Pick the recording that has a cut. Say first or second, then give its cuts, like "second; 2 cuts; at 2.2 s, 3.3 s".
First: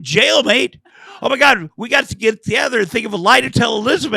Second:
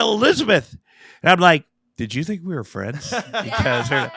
second; 1 cut; at 1.8 s